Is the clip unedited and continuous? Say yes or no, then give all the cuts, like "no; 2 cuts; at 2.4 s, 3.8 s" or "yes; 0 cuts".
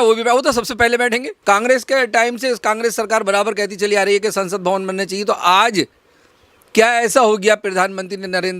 no; 1 cut; at 1.3 s